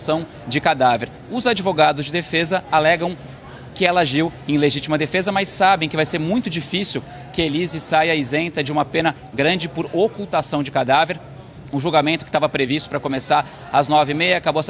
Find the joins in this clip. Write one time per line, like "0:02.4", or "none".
none